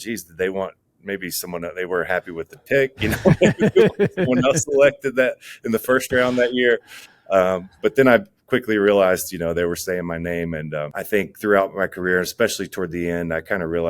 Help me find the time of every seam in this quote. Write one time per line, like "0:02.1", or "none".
0:10.9